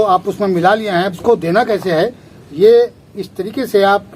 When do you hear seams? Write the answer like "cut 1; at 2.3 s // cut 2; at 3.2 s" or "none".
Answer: cut 1; at 1.1 s